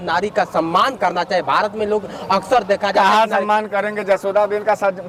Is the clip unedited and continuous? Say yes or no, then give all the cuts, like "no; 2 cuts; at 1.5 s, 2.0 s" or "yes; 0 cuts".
yes; 0 cuts